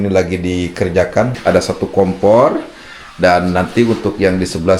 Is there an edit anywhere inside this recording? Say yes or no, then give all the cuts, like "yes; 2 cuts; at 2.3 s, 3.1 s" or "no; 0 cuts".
yes; 1 cut; at 1.4 s